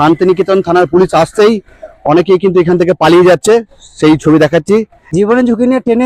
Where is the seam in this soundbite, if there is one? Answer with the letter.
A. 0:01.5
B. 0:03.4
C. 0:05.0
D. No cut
C